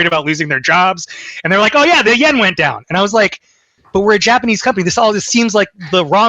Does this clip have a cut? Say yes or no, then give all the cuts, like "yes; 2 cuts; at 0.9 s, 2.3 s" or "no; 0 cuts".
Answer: yes; 1 cut; at 2.0 s